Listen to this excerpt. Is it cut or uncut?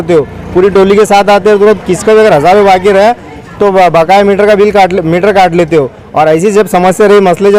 uncut